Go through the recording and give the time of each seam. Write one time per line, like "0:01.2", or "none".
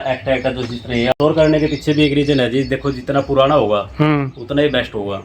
0:01.1